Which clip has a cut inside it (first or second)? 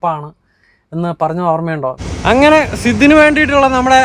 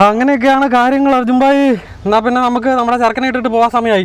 first